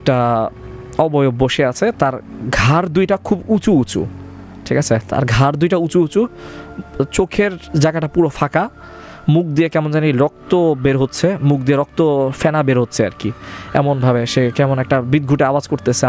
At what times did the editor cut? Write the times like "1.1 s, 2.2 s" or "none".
none